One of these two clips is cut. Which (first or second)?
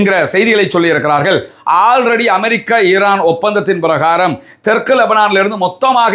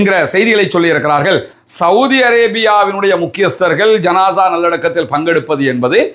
second